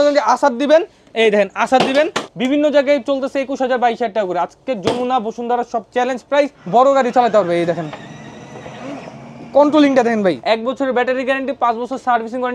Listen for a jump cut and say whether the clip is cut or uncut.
cut